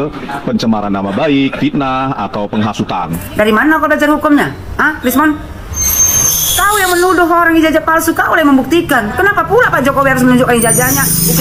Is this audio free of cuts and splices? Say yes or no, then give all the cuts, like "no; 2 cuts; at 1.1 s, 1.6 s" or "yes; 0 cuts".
no; 1 cut; at 3.1 s